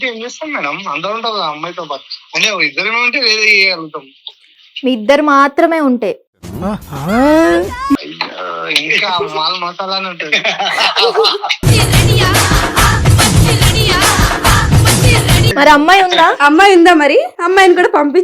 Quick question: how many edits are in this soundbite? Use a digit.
1